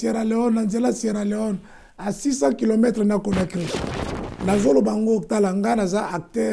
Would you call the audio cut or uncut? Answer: cut